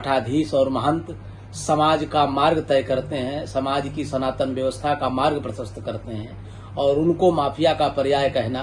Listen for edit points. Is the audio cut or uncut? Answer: uncut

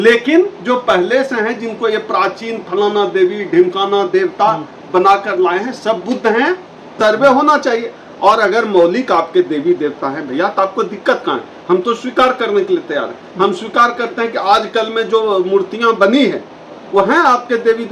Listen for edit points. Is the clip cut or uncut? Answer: cut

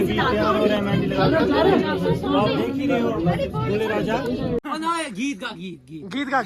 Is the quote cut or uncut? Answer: cut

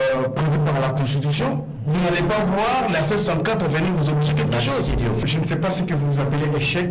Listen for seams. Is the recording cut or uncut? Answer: cut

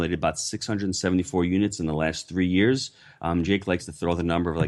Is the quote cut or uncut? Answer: uncut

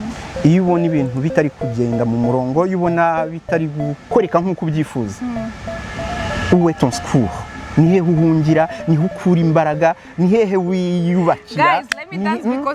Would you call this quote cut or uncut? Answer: uncut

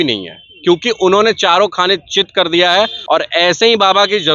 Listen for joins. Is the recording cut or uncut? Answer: cut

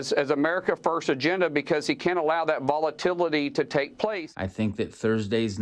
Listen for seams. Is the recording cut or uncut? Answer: cut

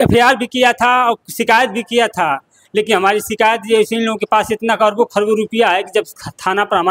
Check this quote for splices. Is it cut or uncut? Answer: uncut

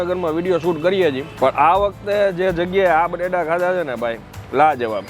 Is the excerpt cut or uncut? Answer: cut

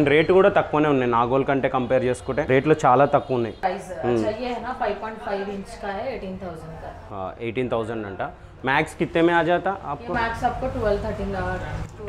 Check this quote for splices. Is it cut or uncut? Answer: cut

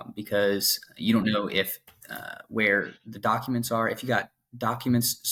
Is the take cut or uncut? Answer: uncut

